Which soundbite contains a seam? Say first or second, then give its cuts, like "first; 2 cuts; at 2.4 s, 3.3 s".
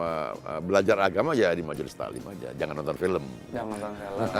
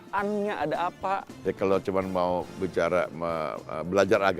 second; 1 cut; at 1.3 s